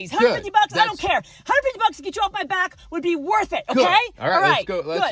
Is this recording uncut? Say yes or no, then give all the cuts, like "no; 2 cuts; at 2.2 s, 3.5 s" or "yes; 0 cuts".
yes; 0 cuts